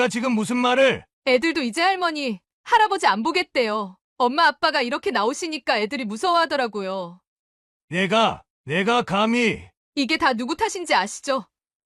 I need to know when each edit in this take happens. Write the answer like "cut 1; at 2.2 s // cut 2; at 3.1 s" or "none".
cut 1; at 1.1 s